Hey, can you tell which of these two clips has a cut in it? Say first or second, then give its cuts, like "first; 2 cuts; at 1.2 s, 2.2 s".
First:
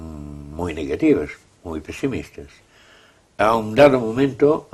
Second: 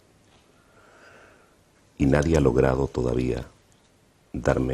second; 1 cut; at 1.1 s